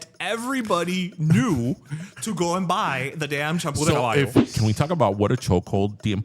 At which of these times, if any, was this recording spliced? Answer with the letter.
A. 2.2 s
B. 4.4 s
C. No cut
B